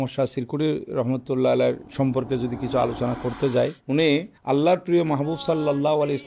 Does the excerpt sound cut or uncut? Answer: cut